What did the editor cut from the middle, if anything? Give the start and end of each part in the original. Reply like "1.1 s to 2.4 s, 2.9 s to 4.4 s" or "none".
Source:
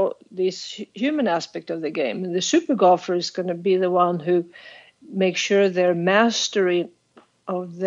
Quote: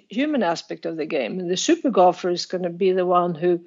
none